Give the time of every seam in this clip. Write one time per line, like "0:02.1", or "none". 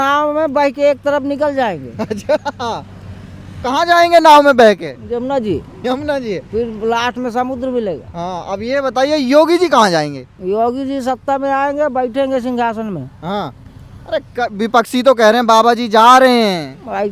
none